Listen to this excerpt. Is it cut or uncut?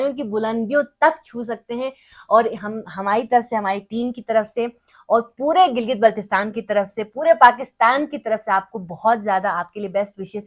uncut